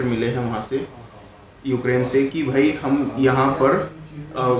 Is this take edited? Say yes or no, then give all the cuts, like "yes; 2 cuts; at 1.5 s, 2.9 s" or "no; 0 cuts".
no; 0 cuts